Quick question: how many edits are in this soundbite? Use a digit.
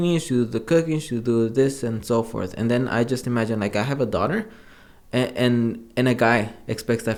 0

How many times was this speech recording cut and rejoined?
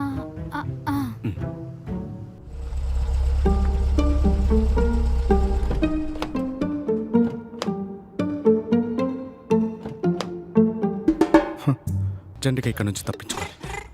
1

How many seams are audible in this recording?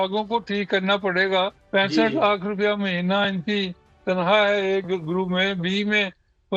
1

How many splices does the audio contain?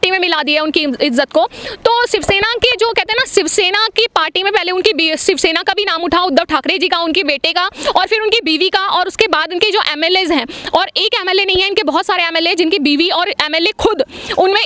0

